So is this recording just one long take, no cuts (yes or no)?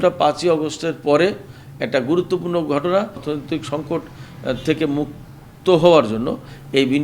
no